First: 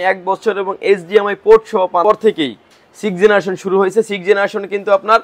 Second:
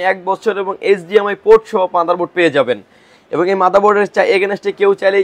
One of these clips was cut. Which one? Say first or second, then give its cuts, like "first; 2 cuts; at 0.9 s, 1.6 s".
first; 1 cut; at 2.0 s